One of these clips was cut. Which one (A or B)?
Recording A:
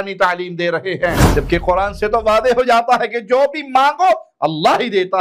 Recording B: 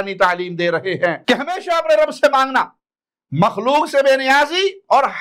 A